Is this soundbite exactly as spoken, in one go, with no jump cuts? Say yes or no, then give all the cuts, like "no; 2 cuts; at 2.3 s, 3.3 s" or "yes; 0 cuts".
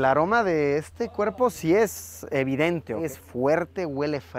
no; 1 cut; at 3.0 s